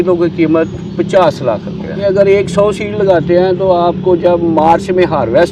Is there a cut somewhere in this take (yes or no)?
yes